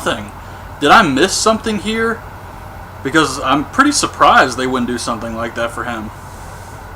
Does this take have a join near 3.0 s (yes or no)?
yes